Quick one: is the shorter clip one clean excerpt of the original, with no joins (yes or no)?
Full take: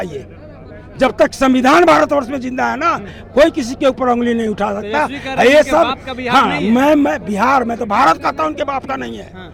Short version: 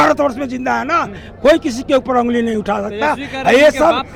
yes